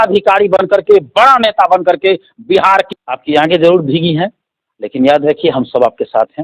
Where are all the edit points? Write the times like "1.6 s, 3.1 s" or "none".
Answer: 2.9 s